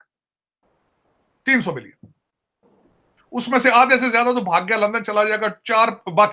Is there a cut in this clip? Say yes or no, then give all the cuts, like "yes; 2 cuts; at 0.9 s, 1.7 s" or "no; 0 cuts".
no; 0 cuts